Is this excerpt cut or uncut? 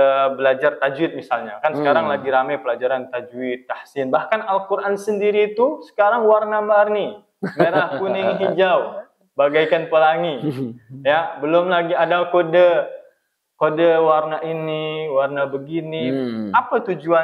uncut